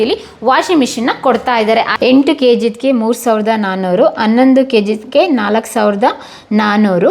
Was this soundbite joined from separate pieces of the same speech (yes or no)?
yes